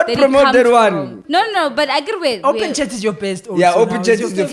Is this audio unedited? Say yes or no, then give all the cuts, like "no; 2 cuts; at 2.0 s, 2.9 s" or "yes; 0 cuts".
no; 1 cut; at 1.2 s